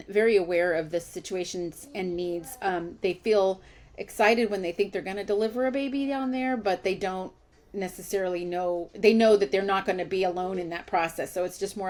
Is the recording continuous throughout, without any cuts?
yes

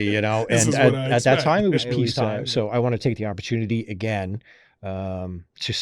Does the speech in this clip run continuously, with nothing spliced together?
no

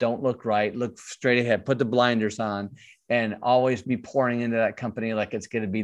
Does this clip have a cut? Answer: no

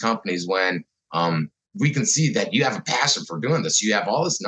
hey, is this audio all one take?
no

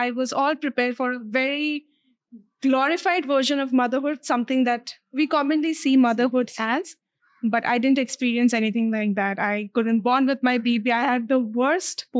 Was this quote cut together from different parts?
no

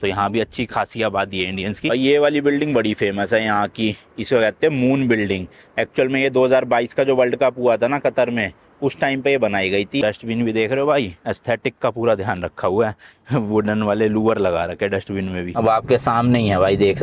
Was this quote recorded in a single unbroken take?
no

